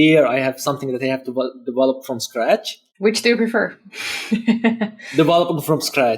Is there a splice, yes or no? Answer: no